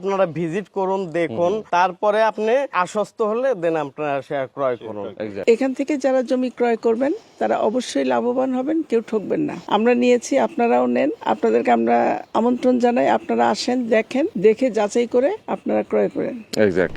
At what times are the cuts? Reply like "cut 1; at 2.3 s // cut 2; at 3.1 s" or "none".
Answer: cut 1; at 1.6 s // cut 2; at 2.7 s // cut 3; at 5.4 s // cut 4; at 9.6 s // cut 5; at 11.2 s // cut 6; at 12.2 s // cut 7; at 14.3 s // cut 8; at 15.5 s